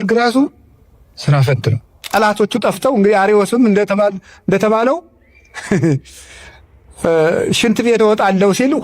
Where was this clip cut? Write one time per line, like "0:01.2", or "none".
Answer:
0:01.9